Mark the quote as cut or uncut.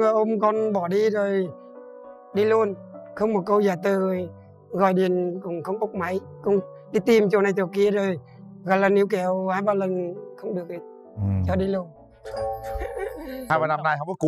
cut